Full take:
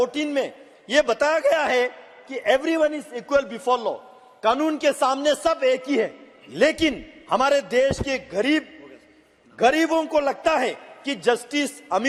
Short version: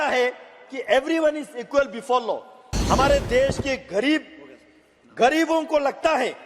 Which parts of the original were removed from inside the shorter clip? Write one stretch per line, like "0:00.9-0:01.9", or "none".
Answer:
0:04.3-0:07.1